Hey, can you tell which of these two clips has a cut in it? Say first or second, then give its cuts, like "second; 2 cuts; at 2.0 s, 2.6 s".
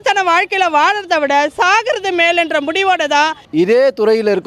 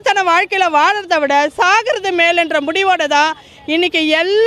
first; 1 cut; at 3.4 s